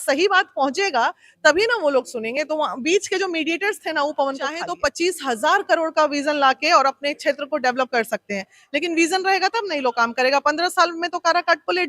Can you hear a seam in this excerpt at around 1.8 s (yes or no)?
no